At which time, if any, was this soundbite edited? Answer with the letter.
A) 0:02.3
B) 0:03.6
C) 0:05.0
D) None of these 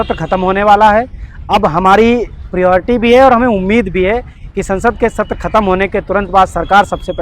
D